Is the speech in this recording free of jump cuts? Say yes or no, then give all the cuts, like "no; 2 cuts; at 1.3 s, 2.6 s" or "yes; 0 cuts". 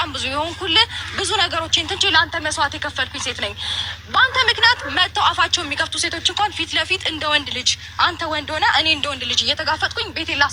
yes; 0 cuts